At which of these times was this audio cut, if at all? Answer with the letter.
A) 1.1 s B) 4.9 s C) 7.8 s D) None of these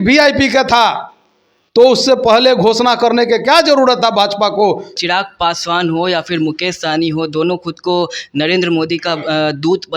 B